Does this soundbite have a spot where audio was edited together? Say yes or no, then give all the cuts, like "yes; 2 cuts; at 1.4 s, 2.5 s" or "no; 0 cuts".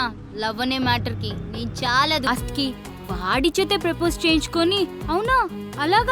yes; 1 cut; at 2.3 s